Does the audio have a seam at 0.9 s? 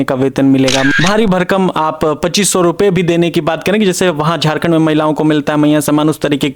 yes; 1 cut; at 0.9 s

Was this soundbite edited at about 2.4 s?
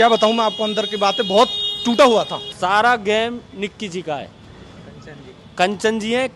yes; 1 cut; at 2.4 s

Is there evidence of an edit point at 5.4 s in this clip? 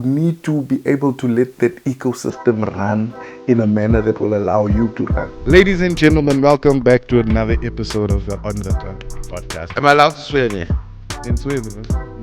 yes; 1 cut; at 5.4 s

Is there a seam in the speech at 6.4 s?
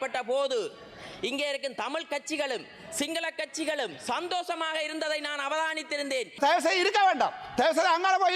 yes; 1 cut; at 6.4 s

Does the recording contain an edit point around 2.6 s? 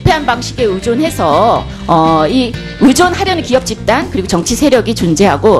yes; 1 cut; at 2.6 s

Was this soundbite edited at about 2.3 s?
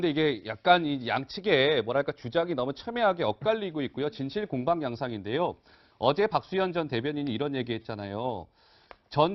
yes; 1 cut; at 2.3 s

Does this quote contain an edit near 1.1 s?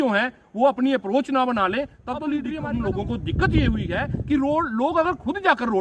no; 1 cut; at 2.5 s

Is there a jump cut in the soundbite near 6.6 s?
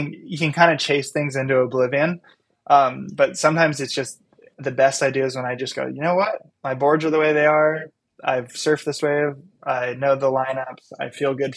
no; 1 cut; at 4.5 s

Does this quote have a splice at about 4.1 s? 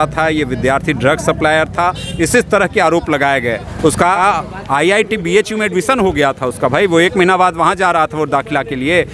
yes; 1 cut; at 4.1 s

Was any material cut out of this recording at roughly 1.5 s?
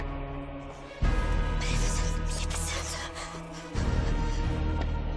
yes; 1 cut; at 1.5 s

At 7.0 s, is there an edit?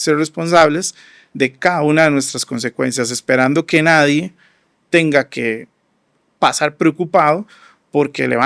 no; 0 cuts

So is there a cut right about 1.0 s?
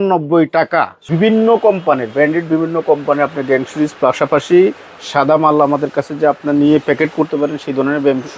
yes; 1 cut; at 1.0 s

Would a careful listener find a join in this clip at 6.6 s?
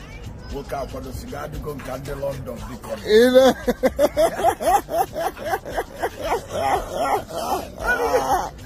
yes; 1 cut; at 6.6 s

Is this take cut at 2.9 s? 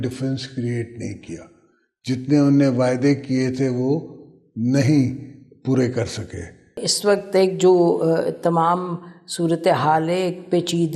no; 1 cut; at 6.9 s

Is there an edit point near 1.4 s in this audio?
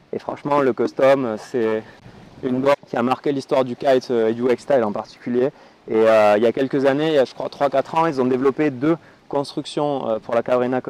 no; 1 cut; at 2.7 s

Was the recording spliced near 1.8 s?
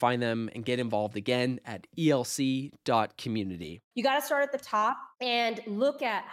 no; 2 cuts; at 3.7 s, 5.1 s

